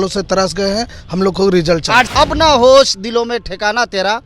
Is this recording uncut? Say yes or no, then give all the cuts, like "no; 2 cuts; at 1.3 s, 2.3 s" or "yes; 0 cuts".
no; 1 cut; at 2.1 s